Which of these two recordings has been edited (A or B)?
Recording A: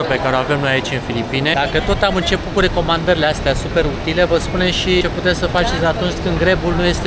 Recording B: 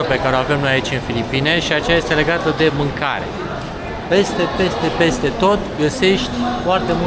A